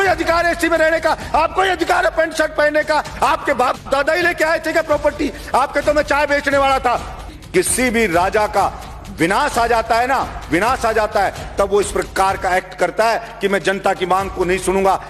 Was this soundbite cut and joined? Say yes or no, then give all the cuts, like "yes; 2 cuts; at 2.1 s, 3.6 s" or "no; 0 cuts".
yes; 1 cut; at 7.3 s